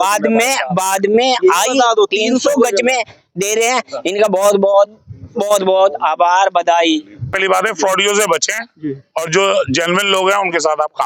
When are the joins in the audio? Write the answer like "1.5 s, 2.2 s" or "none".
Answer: 7.4 s